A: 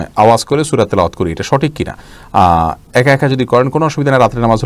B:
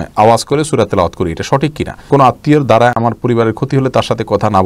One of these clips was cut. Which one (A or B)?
B